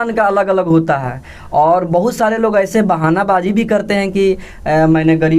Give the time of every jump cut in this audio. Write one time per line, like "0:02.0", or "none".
none